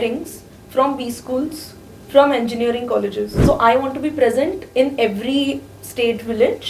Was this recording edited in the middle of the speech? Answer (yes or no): yes